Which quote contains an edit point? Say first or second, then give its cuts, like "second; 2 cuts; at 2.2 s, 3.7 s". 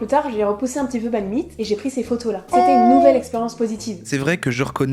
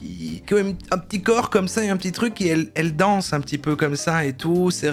first; 1 cut; at 4.0 s